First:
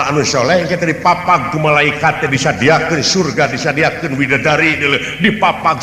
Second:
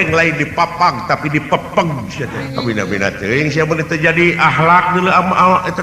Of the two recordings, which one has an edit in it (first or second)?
second